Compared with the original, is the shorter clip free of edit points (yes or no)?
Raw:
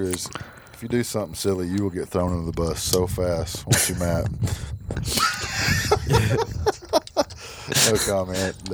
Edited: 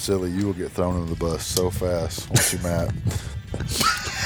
yes